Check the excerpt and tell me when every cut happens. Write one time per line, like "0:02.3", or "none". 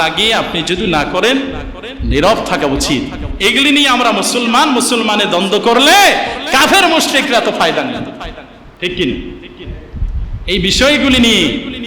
none

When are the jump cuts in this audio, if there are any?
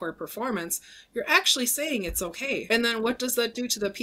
0:02.6

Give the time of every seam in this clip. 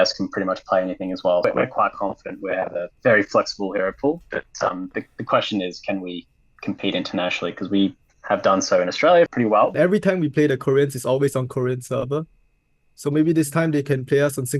0:01.4
0:09.3

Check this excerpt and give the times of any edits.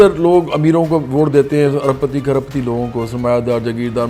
none

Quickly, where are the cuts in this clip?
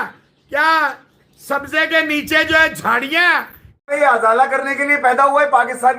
0:03.9

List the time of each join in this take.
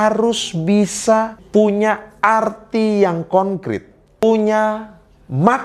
0:01.4
0:04.2

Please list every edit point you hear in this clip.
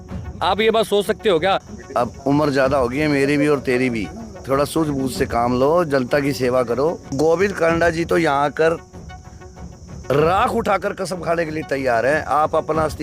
0:01.7
0:07.1

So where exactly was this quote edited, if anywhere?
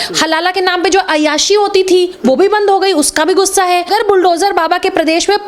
0:03.9

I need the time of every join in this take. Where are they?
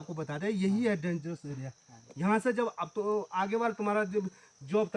none

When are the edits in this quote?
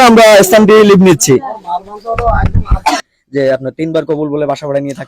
0:03.0

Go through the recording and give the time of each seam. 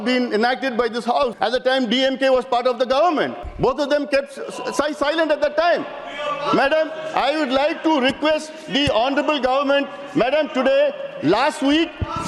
0:01.3
0:03.4

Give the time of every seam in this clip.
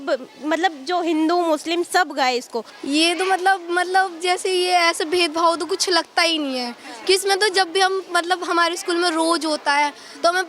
0:02.7

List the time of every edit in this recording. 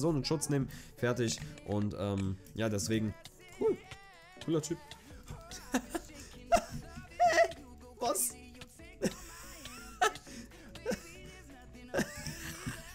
0:03.2

